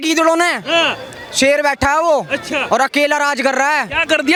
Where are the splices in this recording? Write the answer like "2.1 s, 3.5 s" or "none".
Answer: none